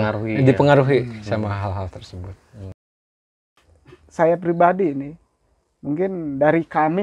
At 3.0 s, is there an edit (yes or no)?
yes